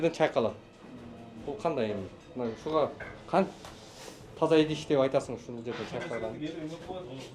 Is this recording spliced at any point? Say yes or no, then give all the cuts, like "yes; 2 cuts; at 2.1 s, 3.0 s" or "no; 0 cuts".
no; 0 cuts